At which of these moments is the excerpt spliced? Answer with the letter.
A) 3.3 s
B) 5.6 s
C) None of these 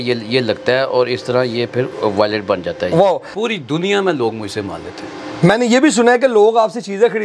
A